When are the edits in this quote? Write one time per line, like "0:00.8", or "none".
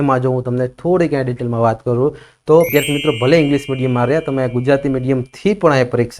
0:02.7